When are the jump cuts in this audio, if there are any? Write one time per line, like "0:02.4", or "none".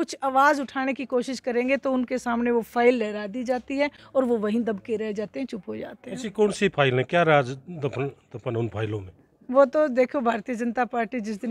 none